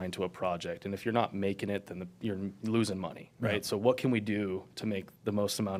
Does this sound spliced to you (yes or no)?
no